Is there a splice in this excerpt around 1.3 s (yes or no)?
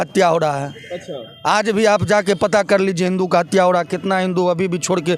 no